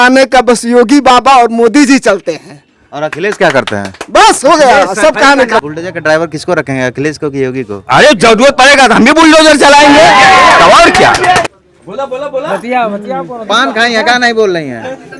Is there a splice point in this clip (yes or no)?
yes